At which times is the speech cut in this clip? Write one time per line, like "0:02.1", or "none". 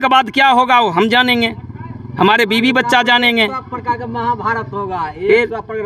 none